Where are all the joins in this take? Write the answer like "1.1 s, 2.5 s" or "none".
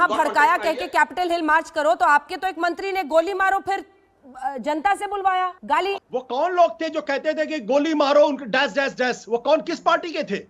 5.6 s